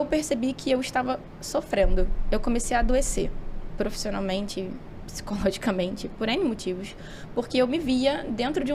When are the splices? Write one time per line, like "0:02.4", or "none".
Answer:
none